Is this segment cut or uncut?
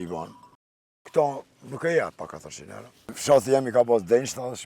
cut